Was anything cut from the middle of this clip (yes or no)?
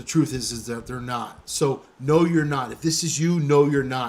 no